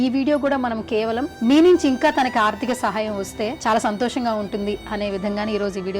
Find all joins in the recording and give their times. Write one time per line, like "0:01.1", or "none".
0:01.3
0:03.6